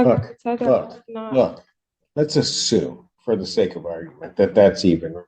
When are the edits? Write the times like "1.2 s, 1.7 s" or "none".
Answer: none